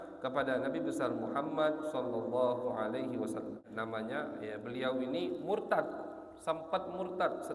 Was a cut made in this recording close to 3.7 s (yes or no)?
yes